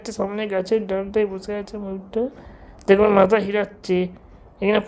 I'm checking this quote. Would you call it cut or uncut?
uncut